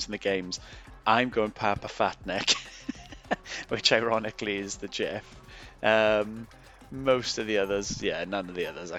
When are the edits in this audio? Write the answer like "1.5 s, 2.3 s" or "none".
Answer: none